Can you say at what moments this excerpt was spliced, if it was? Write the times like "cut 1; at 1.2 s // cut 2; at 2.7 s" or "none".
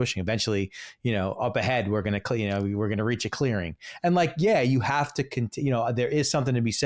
none